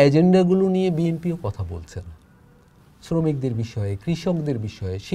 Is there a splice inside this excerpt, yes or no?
no